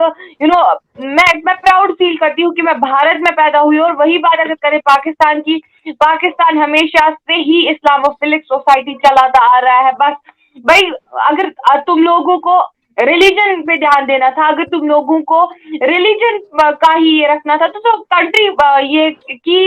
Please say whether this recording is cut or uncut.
uncut